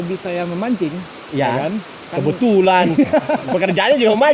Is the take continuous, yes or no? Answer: yes